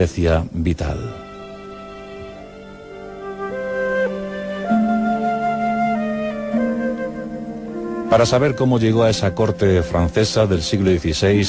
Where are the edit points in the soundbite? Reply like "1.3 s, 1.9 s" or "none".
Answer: 5.8 s